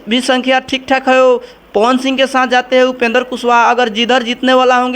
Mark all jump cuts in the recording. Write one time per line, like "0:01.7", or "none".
none